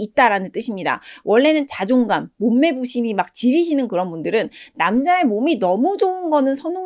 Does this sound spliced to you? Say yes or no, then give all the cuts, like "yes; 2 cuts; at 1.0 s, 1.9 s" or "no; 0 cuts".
no; 0 cuts